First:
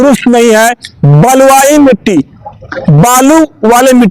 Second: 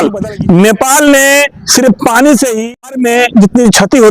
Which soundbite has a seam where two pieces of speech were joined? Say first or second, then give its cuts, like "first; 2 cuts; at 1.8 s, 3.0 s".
second; 1 cut; at 2.6 s